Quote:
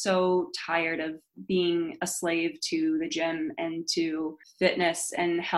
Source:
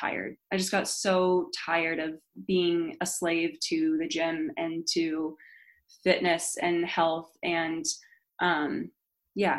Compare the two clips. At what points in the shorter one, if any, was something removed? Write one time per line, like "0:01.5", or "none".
0:04.4